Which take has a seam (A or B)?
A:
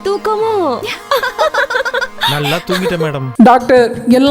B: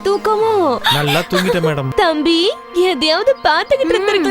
B